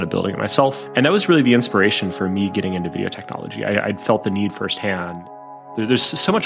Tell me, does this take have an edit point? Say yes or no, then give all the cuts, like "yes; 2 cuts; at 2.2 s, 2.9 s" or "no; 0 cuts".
yes; 1 cut; at 5.3 s